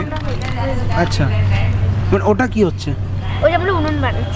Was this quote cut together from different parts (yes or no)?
no